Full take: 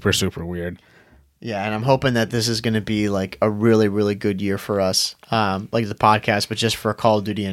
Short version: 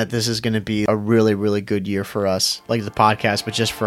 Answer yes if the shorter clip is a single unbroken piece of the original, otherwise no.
no